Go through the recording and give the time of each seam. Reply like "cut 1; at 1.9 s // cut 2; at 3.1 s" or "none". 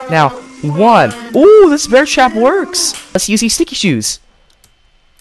cut 1; at 3.2 s